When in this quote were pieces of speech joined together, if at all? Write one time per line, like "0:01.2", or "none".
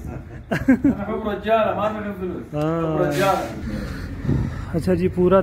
0:03.6